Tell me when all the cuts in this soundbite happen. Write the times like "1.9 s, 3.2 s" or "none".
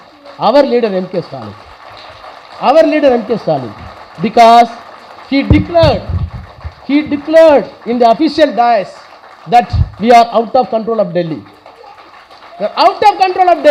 none